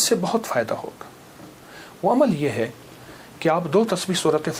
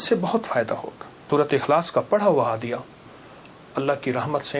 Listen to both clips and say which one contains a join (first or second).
second